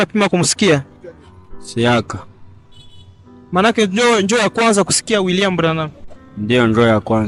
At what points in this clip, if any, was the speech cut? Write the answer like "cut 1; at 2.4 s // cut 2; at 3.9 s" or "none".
none

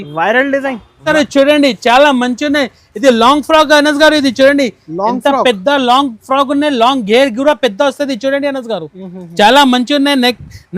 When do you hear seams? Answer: cut 1; at 1.0 s

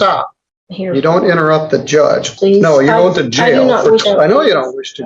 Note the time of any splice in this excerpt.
cut 1; at 2.3 s // cut 2; at 4.0 s

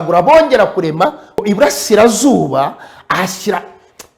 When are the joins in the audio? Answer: cut 1; at 1.4 s

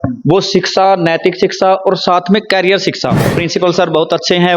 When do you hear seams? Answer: cut 1; at 3.3 s

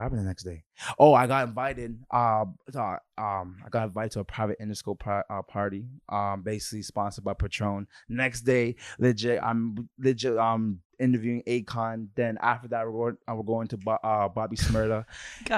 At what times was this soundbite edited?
none

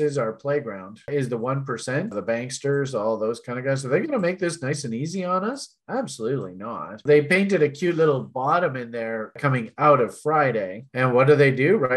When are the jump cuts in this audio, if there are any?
cut 1; at 1.0 s // cut 2; at 7.0 s // cut 3; at 9.4 s

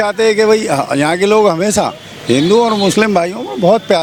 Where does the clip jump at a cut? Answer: none

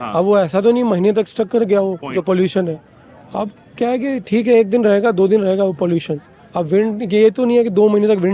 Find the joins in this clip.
none

